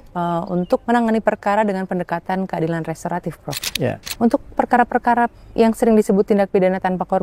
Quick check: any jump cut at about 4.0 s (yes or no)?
yes